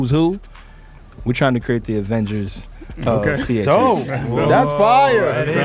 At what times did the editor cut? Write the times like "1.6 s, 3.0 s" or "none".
none